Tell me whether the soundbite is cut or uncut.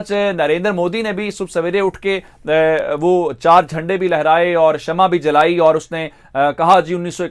uncut